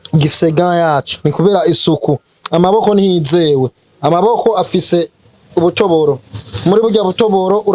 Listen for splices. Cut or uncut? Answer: uncut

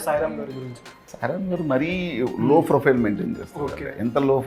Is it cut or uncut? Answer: cut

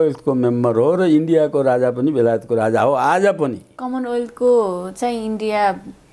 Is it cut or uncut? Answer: uncut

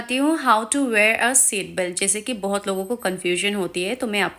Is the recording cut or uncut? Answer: uncut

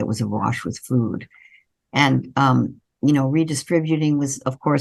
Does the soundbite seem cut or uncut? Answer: uncut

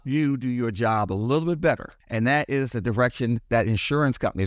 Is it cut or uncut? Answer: cut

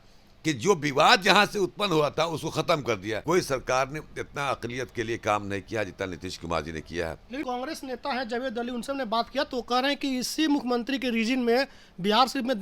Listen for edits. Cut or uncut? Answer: cut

